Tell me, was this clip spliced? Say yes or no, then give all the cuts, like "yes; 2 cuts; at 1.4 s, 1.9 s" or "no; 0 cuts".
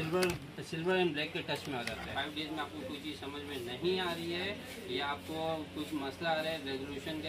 yes; 1 cut; at 2.1 s